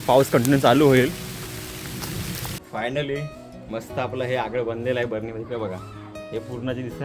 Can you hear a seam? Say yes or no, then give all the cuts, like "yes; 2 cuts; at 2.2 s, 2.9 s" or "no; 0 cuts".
yes; 1 cut; at 2.6 s